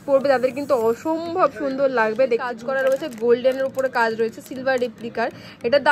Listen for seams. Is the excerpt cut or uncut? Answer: cut